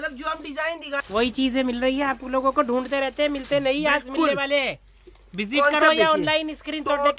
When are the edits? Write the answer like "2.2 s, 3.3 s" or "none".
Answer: 0.9 s